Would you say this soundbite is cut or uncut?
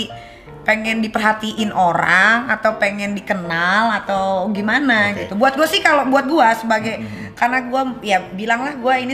uncut